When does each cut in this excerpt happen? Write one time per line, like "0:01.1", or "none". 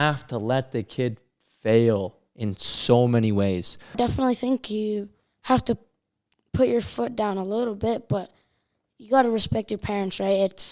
0:04.0